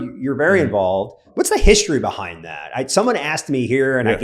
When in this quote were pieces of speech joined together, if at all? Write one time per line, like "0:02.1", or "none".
0:01.2